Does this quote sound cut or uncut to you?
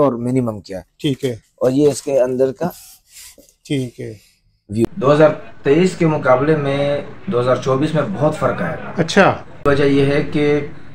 cut